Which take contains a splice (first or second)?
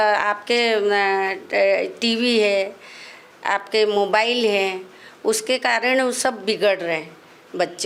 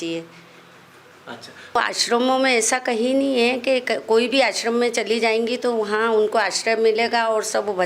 second